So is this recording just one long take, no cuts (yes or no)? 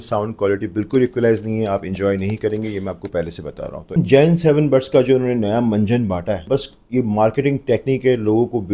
no